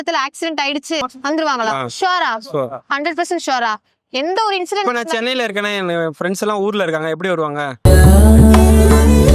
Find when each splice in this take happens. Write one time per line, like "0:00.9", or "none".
0:01.1